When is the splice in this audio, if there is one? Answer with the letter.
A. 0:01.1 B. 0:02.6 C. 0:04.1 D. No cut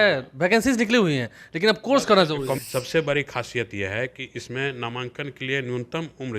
B